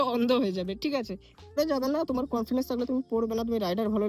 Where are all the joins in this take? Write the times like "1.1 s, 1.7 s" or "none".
1.6 s